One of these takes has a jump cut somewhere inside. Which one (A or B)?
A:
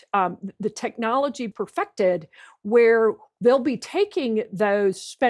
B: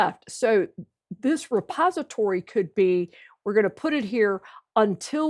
A